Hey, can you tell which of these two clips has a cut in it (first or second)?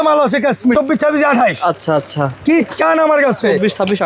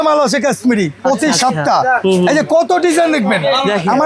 first